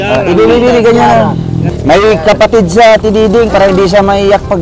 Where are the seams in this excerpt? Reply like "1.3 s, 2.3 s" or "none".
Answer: 1.6 s